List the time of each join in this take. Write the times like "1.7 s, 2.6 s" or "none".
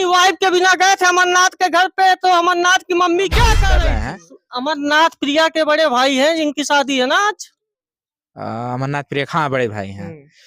3.8 s